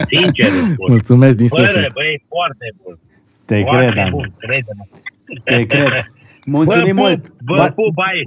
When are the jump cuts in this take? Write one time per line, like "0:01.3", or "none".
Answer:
none